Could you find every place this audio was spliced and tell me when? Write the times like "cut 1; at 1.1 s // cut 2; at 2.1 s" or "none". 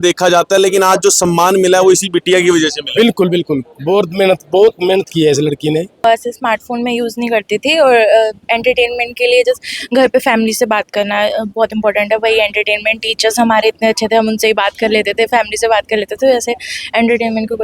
cut 1; at 6.0 s